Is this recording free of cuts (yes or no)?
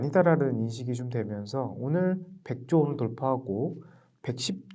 yes